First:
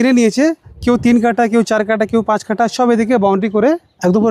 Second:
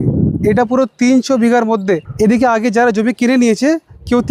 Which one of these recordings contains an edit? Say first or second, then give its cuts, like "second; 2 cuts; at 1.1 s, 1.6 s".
second; 1 cut; at 2.1 s